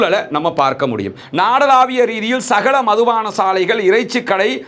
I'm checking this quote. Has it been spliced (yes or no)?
yes